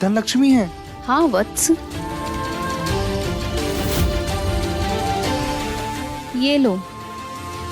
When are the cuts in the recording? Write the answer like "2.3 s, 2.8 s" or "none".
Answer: 2.5 s, 4.9 s